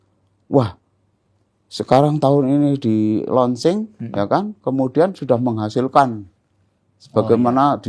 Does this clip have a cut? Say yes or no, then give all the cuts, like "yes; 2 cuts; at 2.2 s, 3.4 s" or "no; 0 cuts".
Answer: no; 0 cuts